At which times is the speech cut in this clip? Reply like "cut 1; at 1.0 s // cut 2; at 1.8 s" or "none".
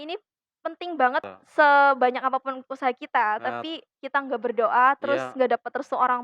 cut 1; at 1.3 s